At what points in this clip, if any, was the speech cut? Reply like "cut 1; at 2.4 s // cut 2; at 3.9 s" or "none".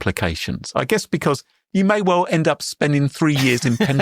cut 1; at 1.6 s

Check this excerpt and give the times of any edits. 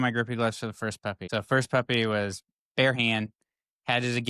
cut 1; at 1.2 s

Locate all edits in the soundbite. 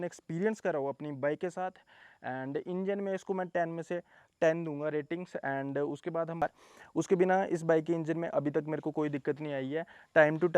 cut 1; at 6.4 s

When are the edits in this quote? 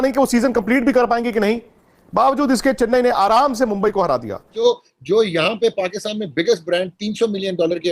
cut 1; at 4.5 s

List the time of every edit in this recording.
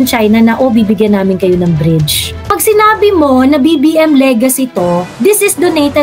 cut 1; at 2.4 s

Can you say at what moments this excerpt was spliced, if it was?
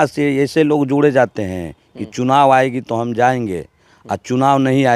none

